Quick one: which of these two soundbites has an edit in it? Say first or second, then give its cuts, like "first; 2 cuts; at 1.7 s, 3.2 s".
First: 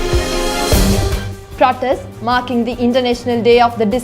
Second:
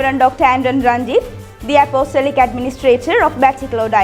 first; 1 cut; at 1.2 s